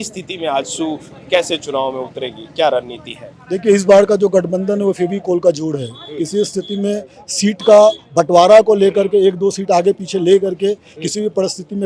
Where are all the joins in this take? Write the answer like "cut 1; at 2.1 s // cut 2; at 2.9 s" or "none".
none